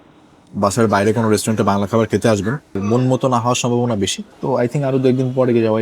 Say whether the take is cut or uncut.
cut